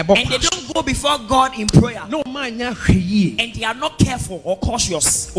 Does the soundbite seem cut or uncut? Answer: uncut